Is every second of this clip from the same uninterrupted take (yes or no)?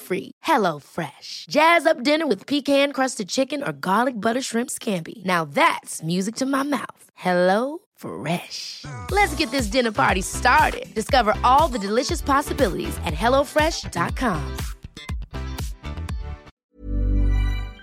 no